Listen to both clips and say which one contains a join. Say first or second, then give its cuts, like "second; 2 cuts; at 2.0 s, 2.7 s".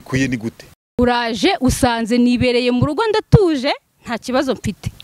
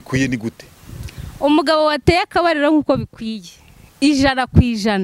first; 1 cut; at 1.0 s